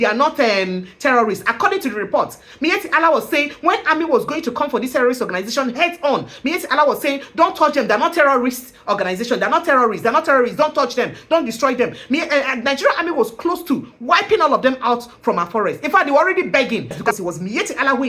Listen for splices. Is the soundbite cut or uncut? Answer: cut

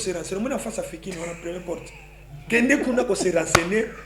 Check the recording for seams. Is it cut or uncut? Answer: uncut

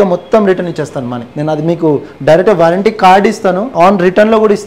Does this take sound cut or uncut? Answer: cut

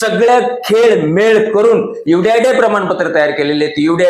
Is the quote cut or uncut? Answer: uncut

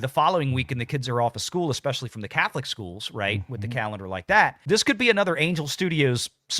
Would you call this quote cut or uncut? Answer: uncut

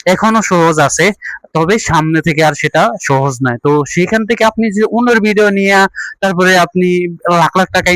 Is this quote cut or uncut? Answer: uncut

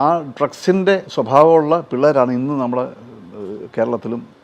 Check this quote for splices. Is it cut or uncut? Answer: uncut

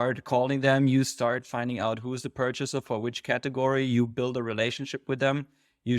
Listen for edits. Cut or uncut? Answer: uncut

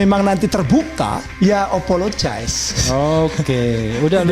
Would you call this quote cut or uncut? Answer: cut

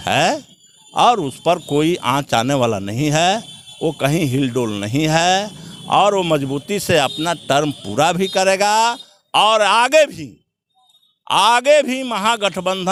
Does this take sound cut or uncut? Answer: uncut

